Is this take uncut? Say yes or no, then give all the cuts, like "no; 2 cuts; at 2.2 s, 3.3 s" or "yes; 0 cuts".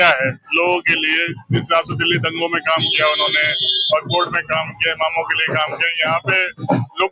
yes; 0 cuts